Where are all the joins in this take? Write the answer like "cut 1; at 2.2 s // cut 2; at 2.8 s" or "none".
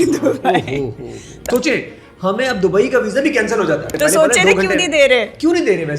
cut 1; at 1.4 s // cut 2; at 3.9 s